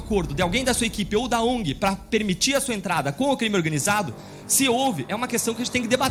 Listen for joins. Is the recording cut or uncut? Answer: uncut